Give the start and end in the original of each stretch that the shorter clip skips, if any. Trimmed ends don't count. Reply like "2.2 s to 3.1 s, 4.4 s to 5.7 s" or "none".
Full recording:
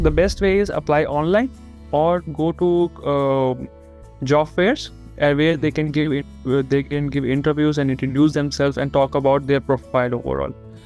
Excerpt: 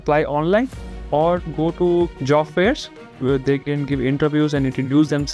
3.0 s to 4.2 s, 5.1 s to 6.3 s